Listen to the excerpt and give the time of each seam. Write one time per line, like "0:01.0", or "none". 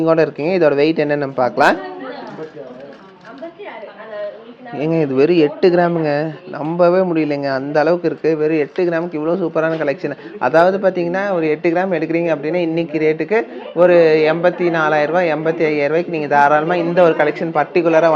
none